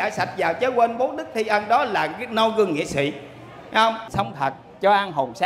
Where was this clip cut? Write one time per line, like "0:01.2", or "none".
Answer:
0:04.1